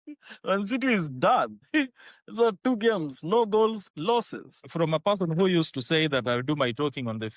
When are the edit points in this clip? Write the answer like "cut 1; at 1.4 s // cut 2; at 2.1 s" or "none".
cut 1; at 1.6 s // cut 2; at 4.6 s